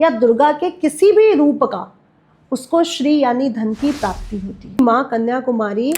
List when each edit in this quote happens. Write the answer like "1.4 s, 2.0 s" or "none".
4.8 s